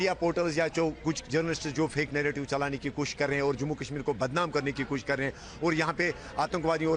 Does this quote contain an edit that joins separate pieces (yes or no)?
no